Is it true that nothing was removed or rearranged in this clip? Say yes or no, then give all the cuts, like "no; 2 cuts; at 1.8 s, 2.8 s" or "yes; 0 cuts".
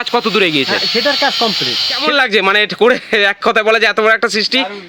no; 1 cut; at 2.1 s